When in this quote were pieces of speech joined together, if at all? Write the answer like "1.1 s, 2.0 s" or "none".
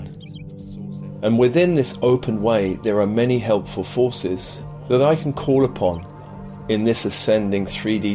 none

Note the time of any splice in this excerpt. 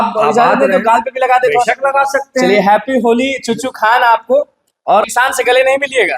5.1 s

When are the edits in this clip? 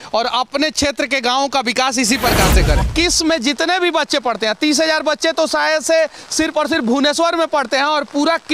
2.8 s

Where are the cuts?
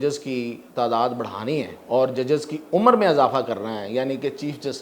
1.8 s

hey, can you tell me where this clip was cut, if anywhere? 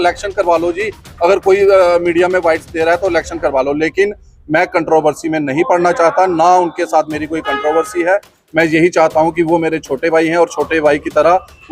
none

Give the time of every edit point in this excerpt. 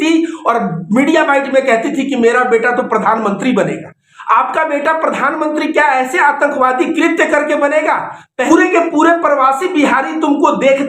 8.5 s

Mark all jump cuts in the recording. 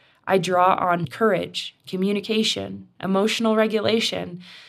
1.0 s

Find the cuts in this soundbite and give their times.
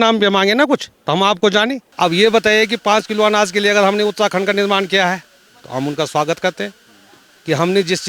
1.8 s

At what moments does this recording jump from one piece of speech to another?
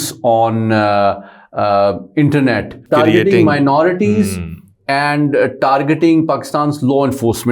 2.8 s

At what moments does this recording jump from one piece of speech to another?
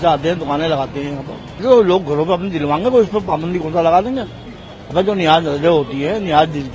1.6 s

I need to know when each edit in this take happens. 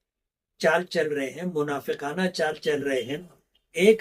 none

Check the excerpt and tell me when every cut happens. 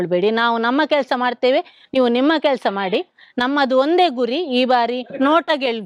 none

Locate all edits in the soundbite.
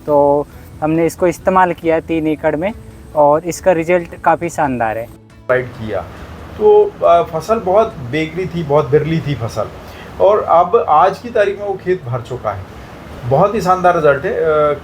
5.4 s

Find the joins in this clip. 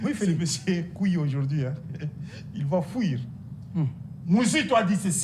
none

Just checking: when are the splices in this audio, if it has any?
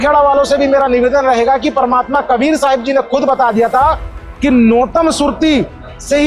none

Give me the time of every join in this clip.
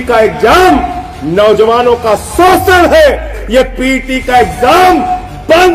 3.4 s

